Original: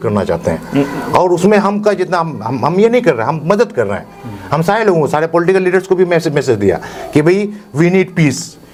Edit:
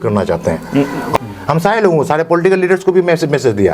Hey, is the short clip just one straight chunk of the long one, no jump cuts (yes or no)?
no